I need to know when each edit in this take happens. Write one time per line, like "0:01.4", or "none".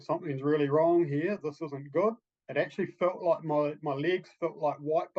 0:02.3